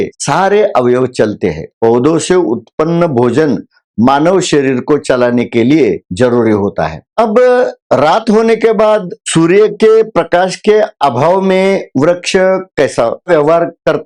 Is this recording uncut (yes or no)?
yes